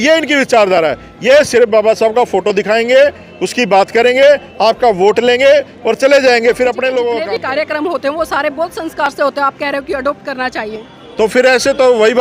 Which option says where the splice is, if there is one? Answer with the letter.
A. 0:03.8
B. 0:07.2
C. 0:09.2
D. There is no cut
B